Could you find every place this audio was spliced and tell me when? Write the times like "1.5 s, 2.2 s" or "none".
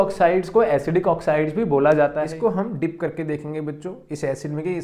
2.2 s